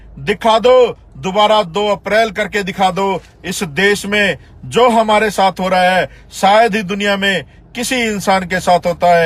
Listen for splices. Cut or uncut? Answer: uncut